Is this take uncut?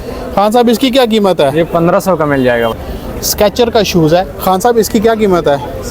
no; 1 cut; at 2.8 s

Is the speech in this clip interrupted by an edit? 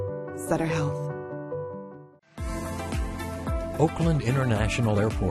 yes; 1 cut; at 2.0 s

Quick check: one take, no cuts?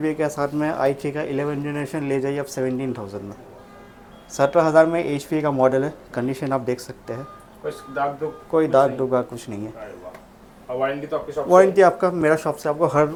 yes; 0 cuts

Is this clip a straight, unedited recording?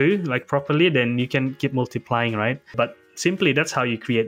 no; 1 cut; at 2.7 s

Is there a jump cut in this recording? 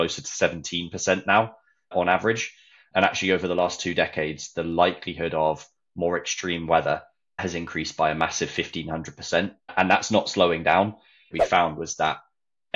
yes; 3 cuts; at 7.4 s, 9.7 s, 11.3 s

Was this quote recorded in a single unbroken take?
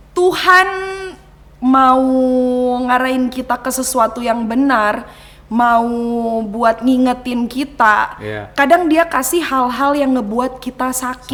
yes; 0 cuts

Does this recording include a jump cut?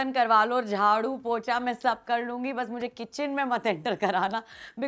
no; 0 cuts

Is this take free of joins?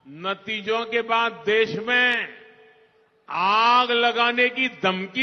yes; 0 cuts

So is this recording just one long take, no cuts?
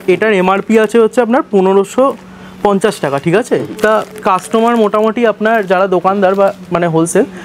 yes; 0 cuts

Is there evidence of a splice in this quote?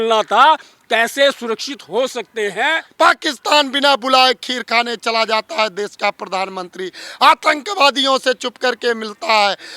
yes; 1 cut; at 2.8 s

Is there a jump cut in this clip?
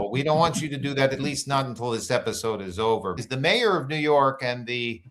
yes; 1 cut; at 3.2 s

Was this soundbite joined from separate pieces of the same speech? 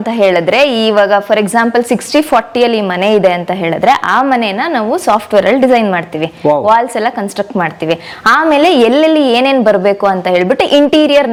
no; 0 cuts

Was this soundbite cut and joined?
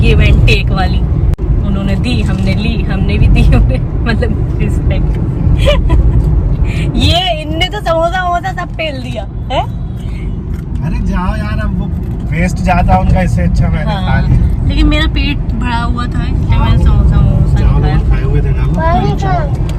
no; 0 cuts

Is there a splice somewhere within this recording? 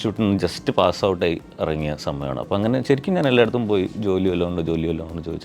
no; 0 cuts

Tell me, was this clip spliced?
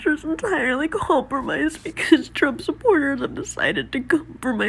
no; 0 cuts

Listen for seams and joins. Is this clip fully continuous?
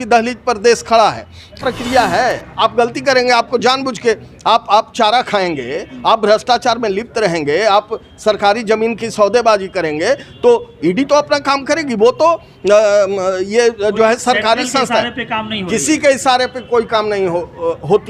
no; 1 cut; at 1.5 s

